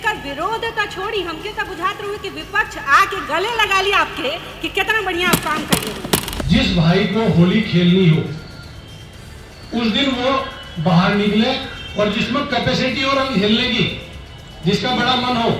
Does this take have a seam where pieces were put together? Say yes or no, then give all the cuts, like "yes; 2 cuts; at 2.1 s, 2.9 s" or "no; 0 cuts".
yes; 1 cut; at 6.4 s